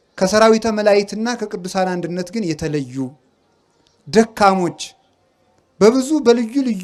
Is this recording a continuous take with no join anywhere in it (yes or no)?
yes